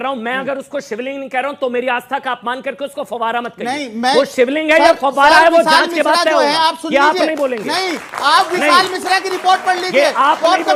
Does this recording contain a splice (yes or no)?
no